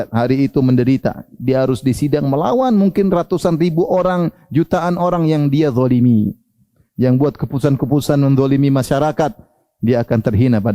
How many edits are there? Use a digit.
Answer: 0